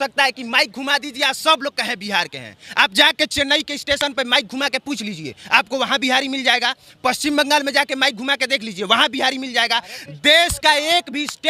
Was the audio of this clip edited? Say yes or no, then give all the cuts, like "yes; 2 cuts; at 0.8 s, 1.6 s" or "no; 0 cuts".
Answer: no; 0 cuts